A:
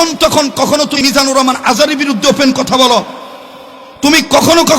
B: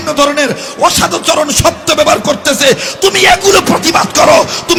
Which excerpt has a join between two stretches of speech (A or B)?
A